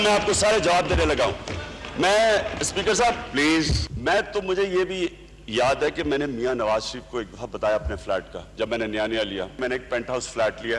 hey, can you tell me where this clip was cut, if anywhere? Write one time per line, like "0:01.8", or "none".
0:03.9
0:09.6